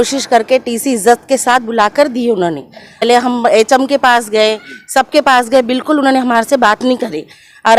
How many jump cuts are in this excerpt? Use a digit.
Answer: 1